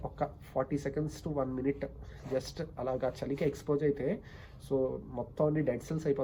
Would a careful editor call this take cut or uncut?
uncut